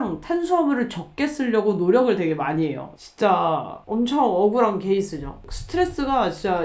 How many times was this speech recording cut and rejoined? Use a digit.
1